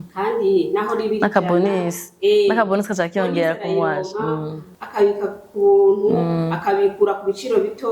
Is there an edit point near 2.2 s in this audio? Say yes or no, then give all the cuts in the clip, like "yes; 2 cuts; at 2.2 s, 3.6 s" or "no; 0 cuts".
no; 0 cuts